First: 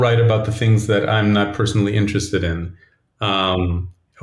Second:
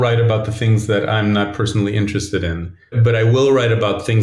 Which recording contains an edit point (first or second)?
second